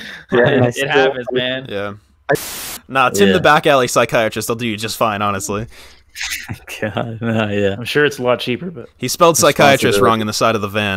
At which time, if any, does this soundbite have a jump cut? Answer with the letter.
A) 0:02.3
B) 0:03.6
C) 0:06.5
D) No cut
A